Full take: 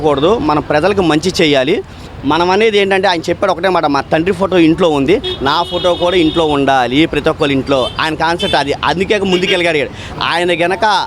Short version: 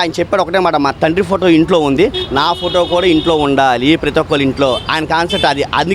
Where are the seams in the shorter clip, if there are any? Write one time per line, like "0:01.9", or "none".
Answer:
none